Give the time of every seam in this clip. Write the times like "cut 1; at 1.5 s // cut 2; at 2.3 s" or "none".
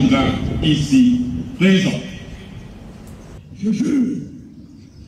cut 1; at 3.4 s